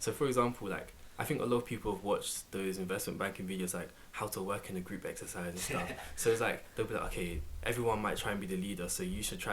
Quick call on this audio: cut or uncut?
cut